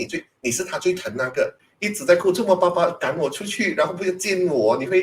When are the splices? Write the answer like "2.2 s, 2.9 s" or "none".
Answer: 1.6 s